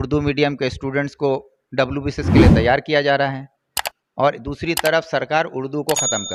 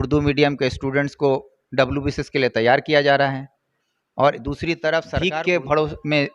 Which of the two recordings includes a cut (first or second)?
second